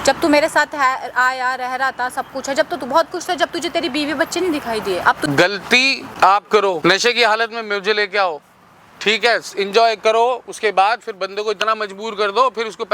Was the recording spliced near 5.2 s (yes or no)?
yes